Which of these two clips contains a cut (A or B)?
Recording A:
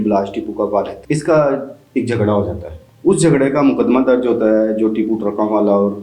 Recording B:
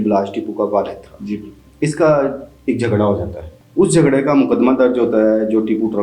A